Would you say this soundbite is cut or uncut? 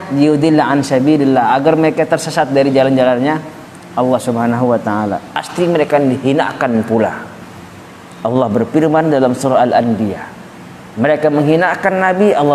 cut